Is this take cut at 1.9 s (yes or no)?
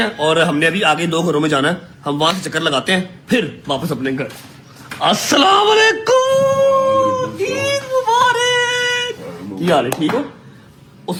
no